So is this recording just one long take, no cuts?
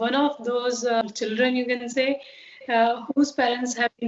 no; 1 cut; at 1.0 s

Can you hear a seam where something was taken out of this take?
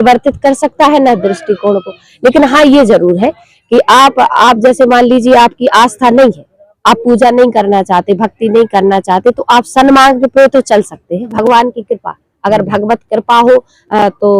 yes; 1 cut; at 11.3 s

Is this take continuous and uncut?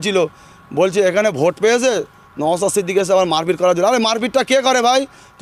yes; 0 cuts

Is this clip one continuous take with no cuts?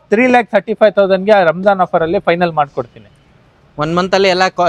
yes; 0 cuts

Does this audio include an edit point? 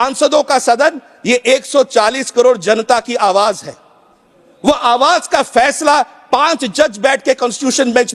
no; 0 cuts

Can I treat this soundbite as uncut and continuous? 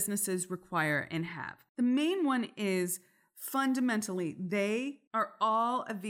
no; 1 cut; at 5.0 s

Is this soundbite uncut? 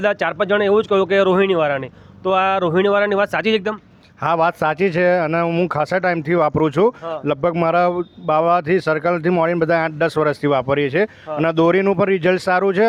yes; 0 cuts

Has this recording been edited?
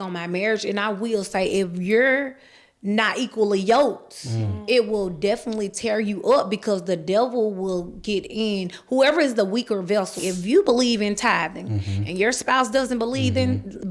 yes; 1 cut; at 10.1 s

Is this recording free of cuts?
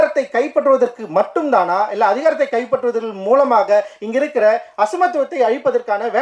yes; 0 cuts

